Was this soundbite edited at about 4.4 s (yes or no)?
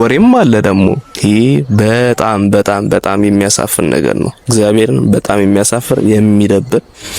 no